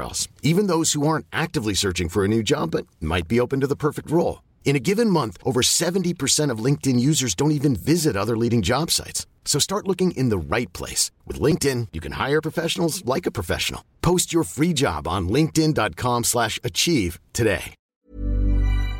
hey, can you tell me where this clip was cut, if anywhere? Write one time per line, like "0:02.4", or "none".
0:17.8